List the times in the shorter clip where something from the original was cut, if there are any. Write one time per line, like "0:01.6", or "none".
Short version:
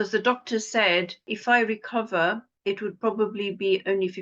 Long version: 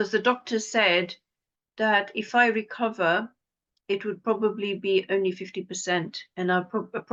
0:01.3
0:02.5